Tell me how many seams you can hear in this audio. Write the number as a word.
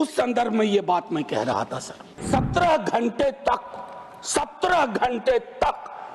one